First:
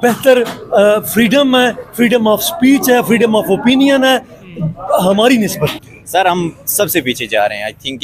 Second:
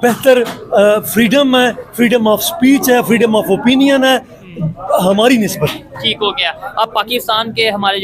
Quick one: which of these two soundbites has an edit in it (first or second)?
first